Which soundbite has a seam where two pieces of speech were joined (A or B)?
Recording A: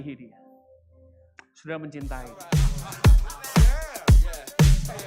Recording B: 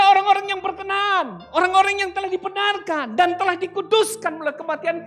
A